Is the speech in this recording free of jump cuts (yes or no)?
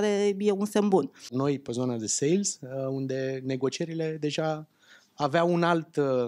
no